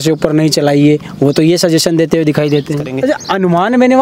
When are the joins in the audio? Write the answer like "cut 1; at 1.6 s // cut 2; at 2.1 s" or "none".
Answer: cut 1; at 2.9 s